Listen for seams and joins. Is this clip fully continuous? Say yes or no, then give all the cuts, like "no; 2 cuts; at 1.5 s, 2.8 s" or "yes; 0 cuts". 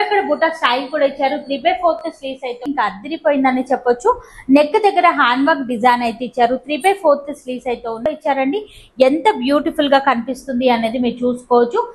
no; 2 cuts; at 2.6 s, 8.0 s